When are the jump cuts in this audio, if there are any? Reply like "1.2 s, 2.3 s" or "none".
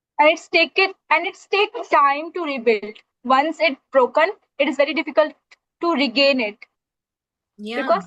none